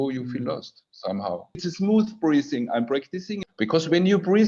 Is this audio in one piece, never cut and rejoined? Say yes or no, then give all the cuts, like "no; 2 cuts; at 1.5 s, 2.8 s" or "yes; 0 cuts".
no; 2 cuts; at 1.6 s, 3.4 s